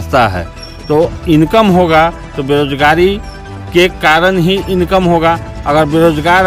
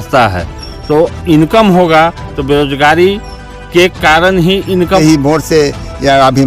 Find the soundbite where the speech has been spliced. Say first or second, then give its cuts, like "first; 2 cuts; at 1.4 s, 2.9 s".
second; 1 cut; at 5.0 s